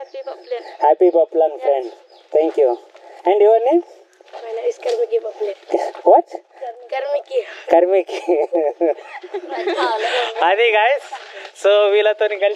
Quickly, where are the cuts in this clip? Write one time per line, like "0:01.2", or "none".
none